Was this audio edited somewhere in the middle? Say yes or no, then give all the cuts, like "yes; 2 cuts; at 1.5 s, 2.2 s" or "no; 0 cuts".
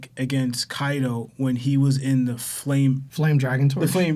yes; 1 cut; at 3.1 s